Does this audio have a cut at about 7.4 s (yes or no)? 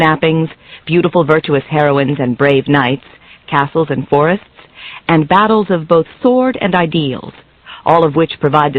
no